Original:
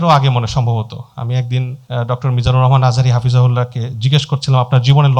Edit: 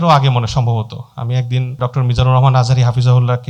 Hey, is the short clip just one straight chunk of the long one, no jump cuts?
no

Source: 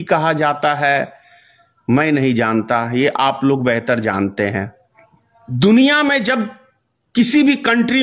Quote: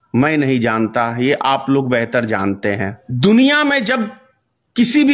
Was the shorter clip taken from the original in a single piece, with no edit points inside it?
no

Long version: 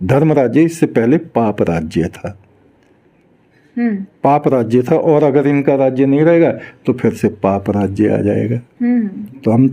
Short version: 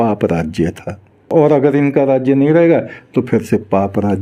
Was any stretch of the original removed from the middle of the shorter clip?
yes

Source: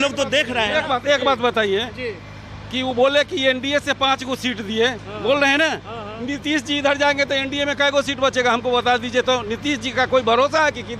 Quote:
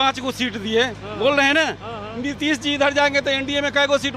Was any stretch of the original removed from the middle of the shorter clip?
no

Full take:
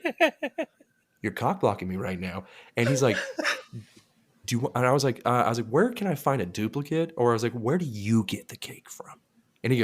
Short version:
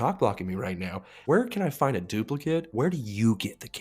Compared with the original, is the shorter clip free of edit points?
no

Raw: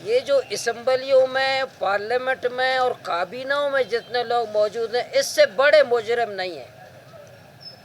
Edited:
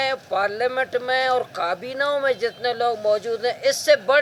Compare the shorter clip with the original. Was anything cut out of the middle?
no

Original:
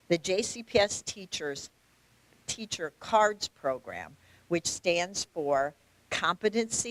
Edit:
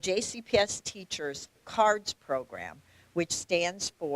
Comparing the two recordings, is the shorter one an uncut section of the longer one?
no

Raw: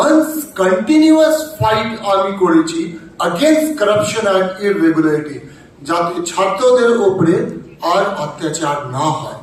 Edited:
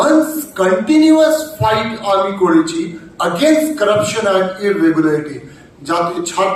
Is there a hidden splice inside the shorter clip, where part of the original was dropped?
no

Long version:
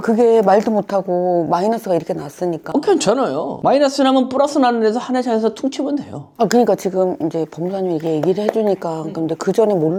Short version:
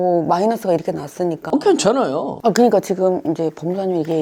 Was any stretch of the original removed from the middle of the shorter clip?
yes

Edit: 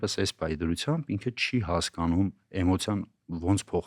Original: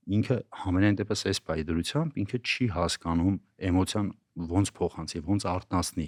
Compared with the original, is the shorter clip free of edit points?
yes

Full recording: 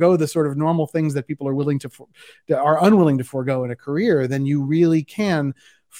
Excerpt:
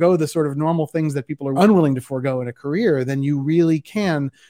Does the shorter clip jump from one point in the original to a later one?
yes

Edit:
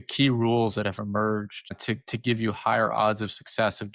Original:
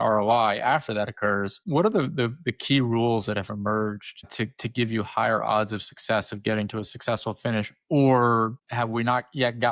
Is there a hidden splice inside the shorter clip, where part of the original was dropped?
no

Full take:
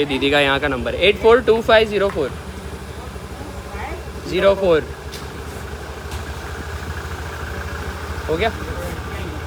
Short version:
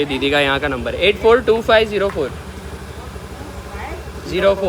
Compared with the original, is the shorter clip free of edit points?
yes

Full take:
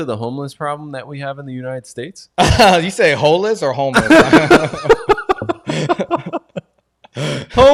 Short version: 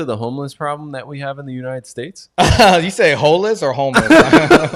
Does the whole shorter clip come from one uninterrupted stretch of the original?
yes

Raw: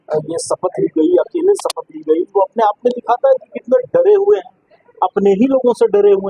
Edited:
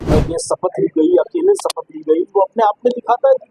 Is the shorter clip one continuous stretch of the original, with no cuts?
yes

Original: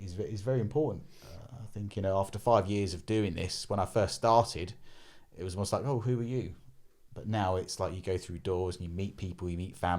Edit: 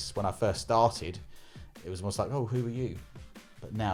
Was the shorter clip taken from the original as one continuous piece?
yes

